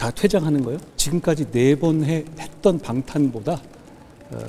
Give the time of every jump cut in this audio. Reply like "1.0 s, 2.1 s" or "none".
0.9 s